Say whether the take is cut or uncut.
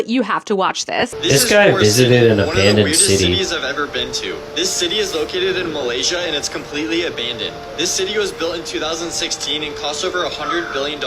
cut